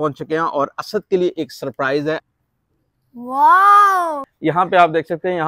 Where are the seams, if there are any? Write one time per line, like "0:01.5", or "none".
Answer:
0:02.3
0:04.3